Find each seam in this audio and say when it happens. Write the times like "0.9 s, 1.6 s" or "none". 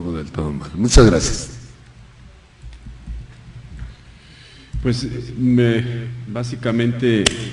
none